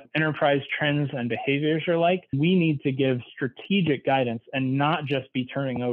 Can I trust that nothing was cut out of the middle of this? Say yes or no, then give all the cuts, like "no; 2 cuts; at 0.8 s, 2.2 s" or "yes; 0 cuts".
no; 1 cut; at 2.3 s